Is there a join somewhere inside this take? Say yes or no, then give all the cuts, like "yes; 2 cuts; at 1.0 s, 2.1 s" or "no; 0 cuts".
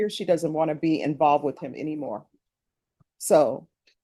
no; 0 cuts